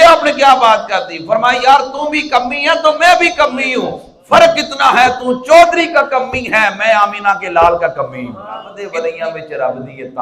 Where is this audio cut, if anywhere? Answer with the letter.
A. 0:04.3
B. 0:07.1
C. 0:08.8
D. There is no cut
C